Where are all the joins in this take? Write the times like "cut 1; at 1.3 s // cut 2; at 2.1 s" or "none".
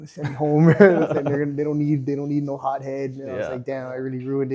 none